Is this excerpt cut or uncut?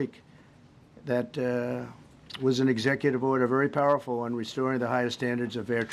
uncut